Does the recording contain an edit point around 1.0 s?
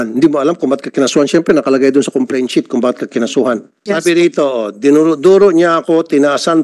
no; 1 cut; at 3.7 s

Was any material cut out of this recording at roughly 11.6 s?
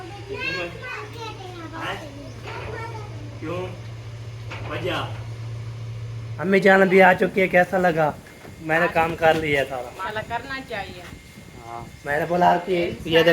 no; 3 cuts; at 0.9 s, 6.5 s, 10.0 s

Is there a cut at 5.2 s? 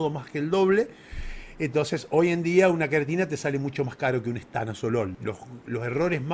yes; 1 cut; at 5.2 s

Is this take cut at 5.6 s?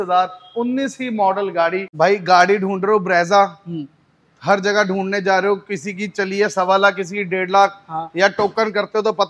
no; 1 cut; at 1.9 s

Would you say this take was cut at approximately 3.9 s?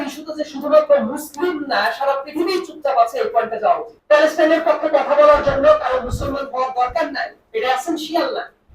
yes; 1 cut; at 3.9 s

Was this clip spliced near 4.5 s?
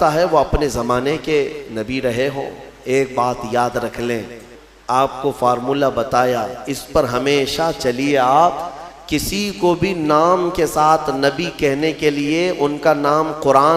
yes; 1 cut; at 4.5 s

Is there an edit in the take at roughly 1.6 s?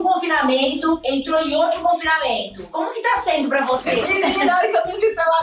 no; 1 cut; at 4.0 s

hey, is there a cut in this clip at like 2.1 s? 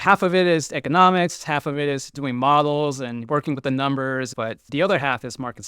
yes; 2 cuts; at 2.1 s, 4.5 s

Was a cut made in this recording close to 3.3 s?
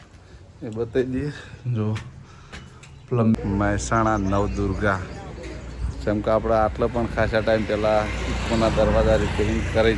yes; 1 cut; at 3.3 s

